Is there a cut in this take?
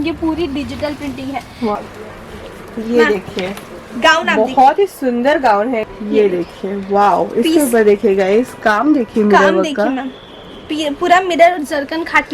yes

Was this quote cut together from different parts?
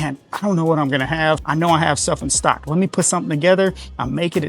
no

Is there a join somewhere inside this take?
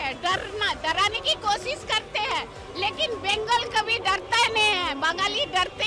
no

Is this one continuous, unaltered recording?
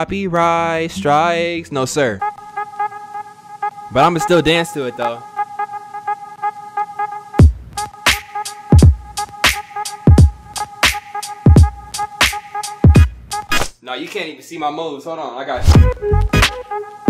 no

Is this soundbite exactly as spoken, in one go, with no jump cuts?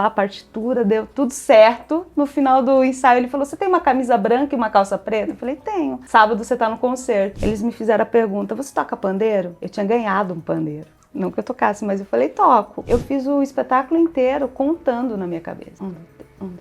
no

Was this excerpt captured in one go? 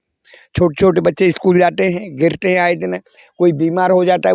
yes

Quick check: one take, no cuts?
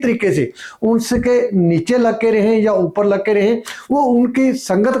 yes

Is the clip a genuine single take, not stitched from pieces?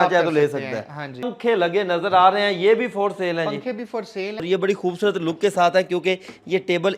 no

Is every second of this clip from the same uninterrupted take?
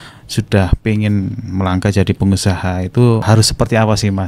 no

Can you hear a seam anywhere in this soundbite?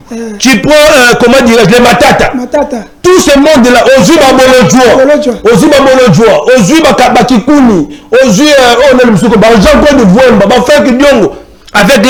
no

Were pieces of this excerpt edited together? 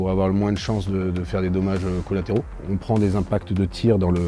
yes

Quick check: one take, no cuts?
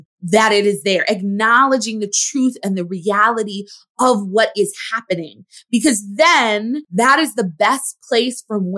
no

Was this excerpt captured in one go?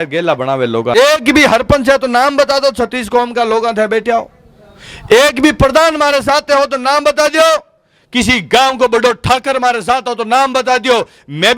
no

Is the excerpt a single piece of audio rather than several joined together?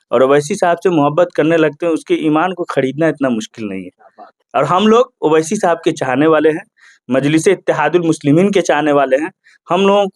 yes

